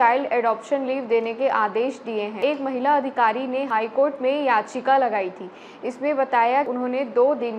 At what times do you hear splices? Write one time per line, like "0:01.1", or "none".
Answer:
0:02.4
0:06.7